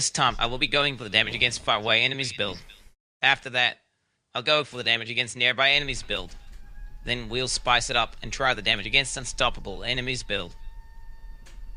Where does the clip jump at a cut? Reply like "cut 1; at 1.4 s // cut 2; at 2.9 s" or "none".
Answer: none